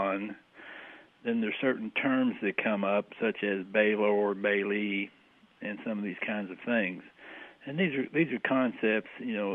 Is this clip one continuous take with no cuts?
no; 1 cut; at 4.4 s

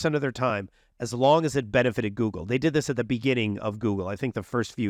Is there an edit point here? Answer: no; 0 cuts

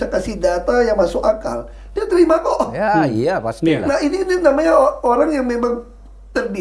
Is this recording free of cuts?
yes; 0 cuts

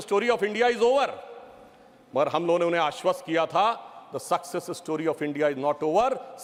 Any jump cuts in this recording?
no; 0 cuts

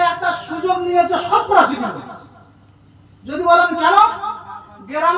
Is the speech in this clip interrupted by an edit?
no; 0 cuts

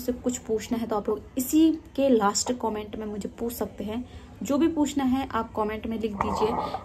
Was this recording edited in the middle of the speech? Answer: no; 0 cuts

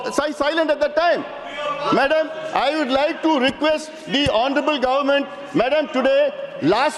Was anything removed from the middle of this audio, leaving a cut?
no; 0 cuts

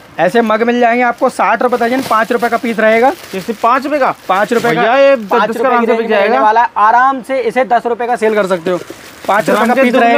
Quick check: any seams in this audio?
no; 0 cuts

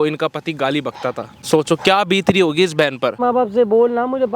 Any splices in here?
yes; 2 cuts; at 1.3 s, 3.2 s

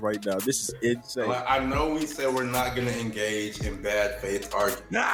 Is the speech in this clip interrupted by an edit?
no; 0 cuts

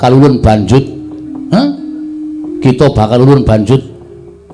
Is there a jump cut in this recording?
no; 0 cuts

